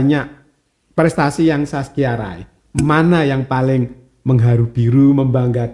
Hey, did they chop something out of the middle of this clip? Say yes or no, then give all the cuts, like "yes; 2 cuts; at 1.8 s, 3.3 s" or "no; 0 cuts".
no; 0 cuts